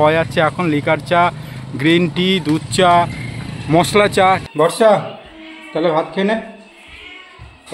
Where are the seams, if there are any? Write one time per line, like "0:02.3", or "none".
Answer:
0:04.4